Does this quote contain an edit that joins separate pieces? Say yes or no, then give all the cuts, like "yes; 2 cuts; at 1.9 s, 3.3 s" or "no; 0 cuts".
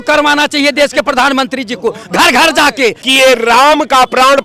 yes; 1 cut; at 3.0 s